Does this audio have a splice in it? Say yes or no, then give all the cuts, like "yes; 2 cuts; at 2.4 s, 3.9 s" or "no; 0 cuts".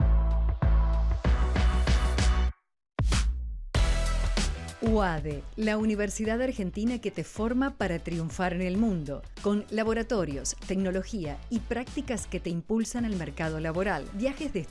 yes; 1 cut; at 1.1 s